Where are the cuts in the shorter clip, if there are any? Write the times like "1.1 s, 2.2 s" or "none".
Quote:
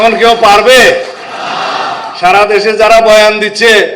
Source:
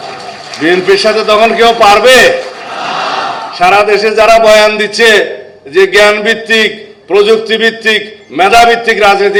none